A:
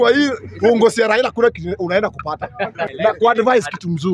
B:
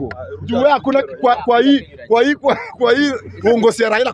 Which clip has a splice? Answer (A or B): A